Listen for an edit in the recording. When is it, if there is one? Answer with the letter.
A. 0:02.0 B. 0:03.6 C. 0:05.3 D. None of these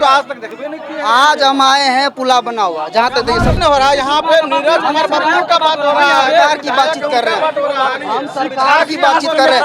B